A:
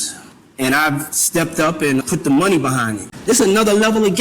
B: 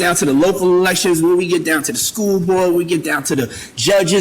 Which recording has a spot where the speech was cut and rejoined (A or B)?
A